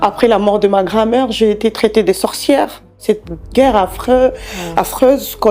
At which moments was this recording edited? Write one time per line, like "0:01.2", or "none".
0:03.0